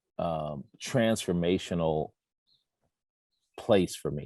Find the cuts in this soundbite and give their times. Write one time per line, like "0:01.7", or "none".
none